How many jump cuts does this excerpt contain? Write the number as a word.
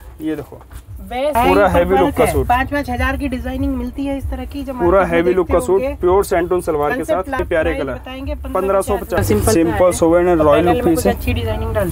three